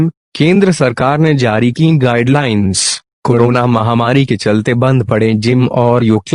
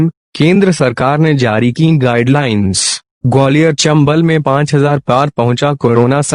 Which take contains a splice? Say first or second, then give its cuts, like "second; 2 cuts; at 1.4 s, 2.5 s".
second; 2 cuts; at 3.1 s, 3.9 s